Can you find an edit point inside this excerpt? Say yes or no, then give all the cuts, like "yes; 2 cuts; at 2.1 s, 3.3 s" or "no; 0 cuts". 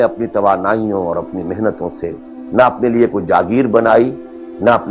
no; 0 cuts